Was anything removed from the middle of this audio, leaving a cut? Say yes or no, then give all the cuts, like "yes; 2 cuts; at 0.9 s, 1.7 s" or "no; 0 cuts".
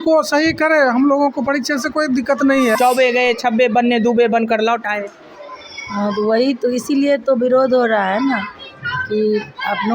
yes; 1 cut; at 2.8 s